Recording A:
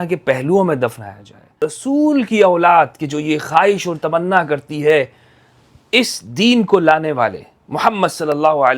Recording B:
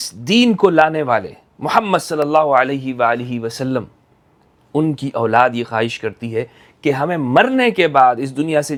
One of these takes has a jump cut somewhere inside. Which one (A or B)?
A